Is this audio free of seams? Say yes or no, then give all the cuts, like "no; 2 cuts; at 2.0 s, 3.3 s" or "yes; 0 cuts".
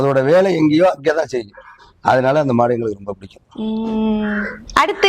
yes; 0 cuts